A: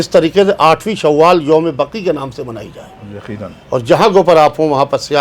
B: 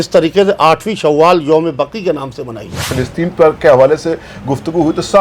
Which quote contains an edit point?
B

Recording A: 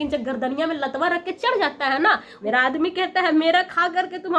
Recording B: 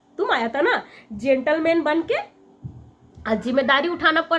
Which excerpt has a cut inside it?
A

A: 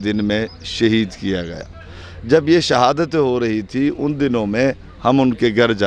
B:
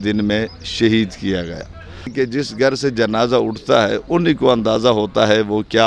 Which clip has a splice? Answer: B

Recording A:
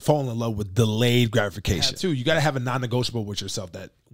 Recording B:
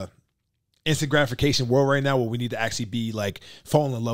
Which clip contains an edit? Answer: A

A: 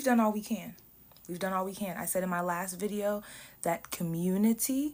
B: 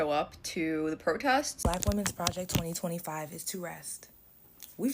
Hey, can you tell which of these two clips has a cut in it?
B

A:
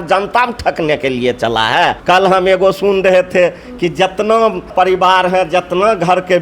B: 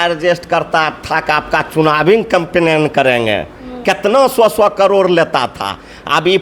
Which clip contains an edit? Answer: A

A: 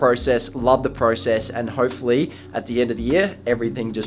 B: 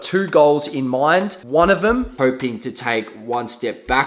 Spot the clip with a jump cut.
B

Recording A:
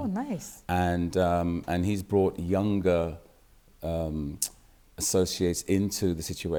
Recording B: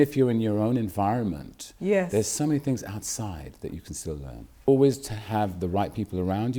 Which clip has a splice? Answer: B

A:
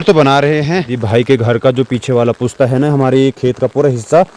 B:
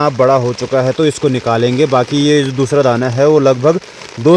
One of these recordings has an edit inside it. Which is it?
A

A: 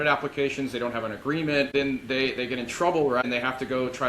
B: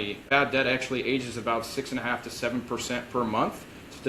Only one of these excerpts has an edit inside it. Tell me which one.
A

